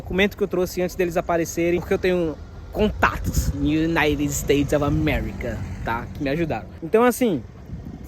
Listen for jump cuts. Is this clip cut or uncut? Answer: cut